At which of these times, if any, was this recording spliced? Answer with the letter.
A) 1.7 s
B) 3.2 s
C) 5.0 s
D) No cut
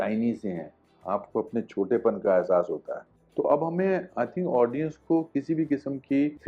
B